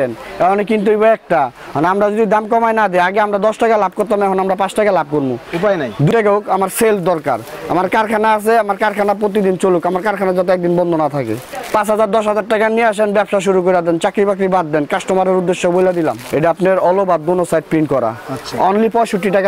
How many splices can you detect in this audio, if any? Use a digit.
3